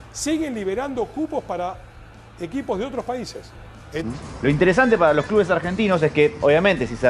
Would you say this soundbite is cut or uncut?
cut